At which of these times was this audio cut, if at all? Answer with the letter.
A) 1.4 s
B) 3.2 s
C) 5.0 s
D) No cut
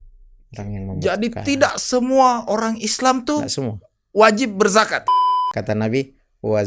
C